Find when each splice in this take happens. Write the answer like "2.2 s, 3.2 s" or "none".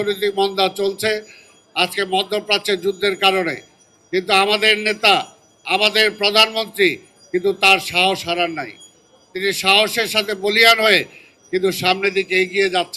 none